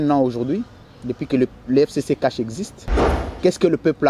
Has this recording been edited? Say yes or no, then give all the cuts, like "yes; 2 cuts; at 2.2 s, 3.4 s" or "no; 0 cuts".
no; 0 cuts